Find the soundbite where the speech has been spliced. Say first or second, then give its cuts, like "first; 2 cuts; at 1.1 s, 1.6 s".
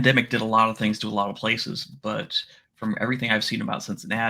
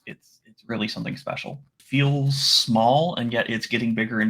second; 1 cut; at 1.8 s